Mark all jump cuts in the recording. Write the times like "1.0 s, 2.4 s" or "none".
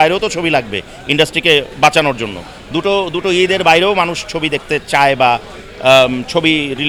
none